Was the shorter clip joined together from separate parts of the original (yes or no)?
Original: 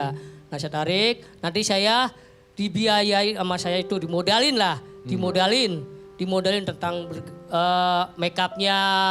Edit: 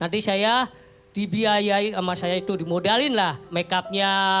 yes